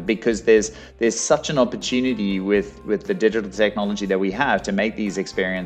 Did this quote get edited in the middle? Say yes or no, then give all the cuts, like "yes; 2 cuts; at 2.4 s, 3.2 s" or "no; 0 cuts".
no; 0 cuts